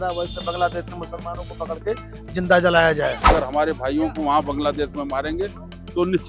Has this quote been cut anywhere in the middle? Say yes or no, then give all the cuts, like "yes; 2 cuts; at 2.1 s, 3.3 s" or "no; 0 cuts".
yes; 1 cut; at 3.3 s